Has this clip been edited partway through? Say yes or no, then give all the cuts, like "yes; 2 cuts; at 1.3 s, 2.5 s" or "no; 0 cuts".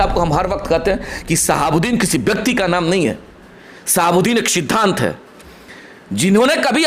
no; 0 cuts